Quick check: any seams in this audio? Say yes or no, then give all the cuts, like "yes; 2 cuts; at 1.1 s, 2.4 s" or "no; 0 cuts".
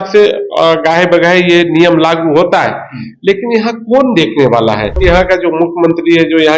yes; 1 cut; at 5.0 s